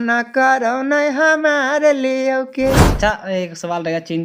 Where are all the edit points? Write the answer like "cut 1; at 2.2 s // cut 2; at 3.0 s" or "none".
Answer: cut 1; at 2.9 s